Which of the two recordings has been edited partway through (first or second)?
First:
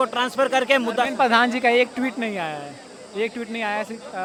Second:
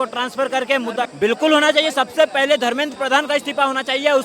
second